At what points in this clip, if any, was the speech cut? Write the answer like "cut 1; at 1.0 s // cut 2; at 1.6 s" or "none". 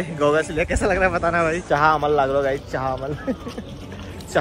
cut 1; at 1.6 s